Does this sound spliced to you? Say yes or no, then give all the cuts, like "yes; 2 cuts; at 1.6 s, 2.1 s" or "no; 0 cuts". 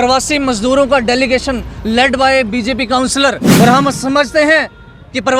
yes; 1 cut; at 3.4 s